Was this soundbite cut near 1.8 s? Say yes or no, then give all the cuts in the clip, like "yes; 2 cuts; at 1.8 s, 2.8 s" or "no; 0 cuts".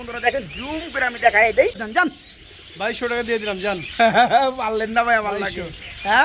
yes; 1 cut; at 1.8 s